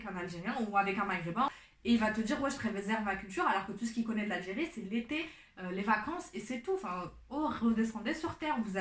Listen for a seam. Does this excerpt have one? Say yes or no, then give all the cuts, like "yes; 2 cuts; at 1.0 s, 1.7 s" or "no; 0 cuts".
yes; 1 cut; at 1.5 s